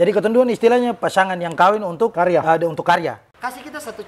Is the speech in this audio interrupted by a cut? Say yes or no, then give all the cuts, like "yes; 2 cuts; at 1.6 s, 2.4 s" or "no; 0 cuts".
yes; 2 cuts; at 2.1 s, 3.2 s